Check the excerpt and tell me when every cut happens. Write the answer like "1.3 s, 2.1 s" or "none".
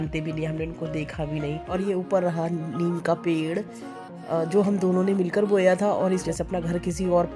1.6 s, 6.2 s